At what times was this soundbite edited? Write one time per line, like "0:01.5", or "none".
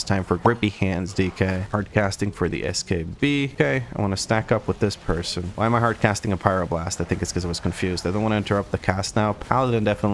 0:01.7